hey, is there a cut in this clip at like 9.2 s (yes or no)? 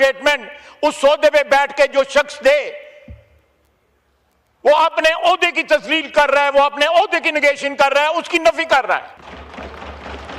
yes